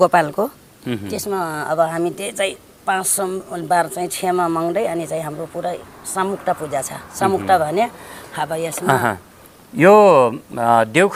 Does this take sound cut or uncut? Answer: uncut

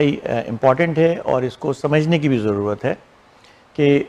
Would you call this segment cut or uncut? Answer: uncut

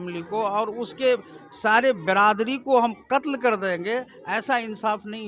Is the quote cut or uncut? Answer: uncut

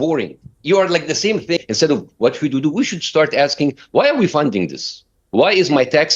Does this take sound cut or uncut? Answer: cut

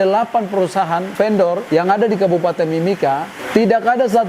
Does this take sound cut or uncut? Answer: cut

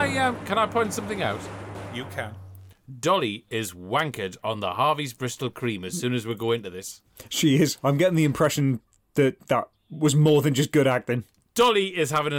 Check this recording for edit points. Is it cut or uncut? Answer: cut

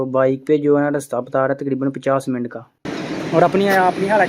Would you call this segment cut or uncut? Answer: cut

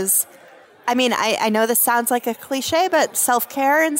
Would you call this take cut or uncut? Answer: uncut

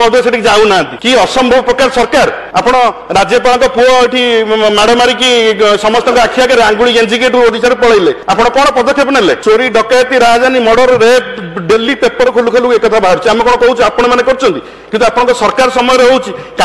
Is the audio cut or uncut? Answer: cut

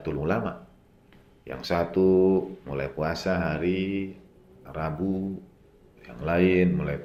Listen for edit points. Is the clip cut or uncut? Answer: uncut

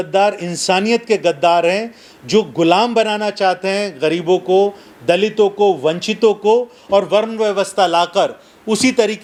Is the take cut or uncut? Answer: uncut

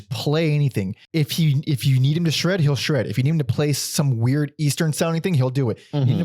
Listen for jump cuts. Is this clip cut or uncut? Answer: cut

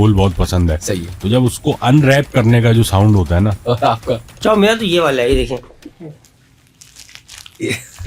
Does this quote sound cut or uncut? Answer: cut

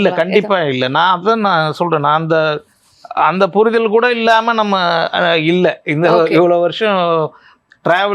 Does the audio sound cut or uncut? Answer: uncut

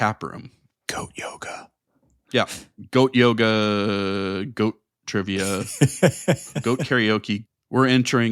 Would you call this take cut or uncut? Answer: cut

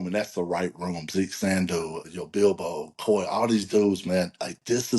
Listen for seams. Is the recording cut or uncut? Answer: cut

